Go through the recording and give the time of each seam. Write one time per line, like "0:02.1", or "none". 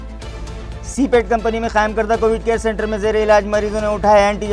0:00.9